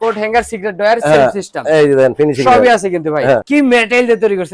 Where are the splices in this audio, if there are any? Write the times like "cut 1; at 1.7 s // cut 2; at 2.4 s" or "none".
cut 1; at 3.4 s

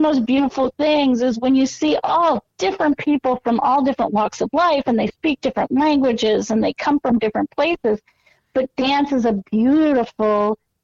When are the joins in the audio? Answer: none

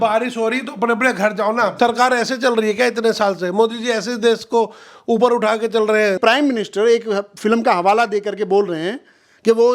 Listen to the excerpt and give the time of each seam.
cut 1; at 1.7 s // cut 2; at 6.2 s

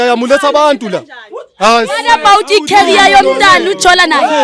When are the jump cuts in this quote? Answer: none

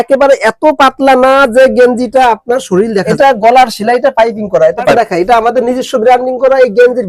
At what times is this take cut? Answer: cut 1; at 3.1 s // cut 2; at 4.9 s

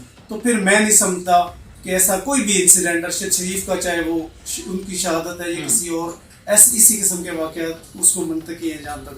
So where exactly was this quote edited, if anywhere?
none

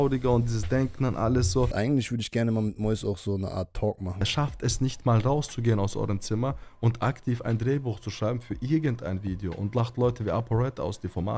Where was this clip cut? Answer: cut 1; at 1.7 s // cut 2; at 4.2 s

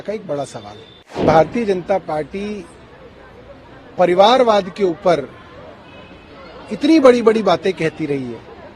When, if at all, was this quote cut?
cut 1; at 1.2 s

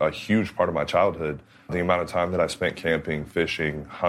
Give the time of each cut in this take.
cut 1; at 1.7 s

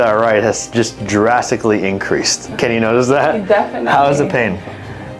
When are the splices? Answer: cut 1; at 2.4 s

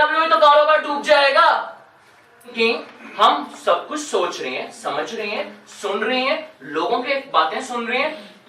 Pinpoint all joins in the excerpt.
cut 1; at 2.5 s

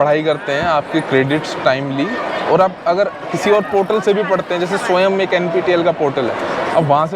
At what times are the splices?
none

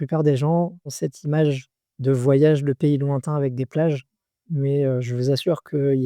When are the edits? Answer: cut 1; at 0.9 s

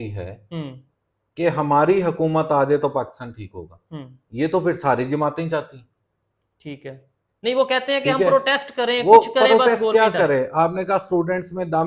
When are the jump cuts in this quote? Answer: none

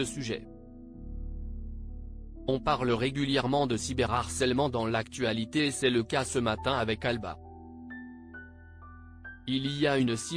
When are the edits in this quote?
none

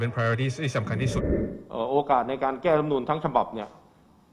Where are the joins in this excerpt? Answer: cut 1; at 1.3 s

